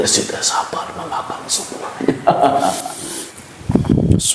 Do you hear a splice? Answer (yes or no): yes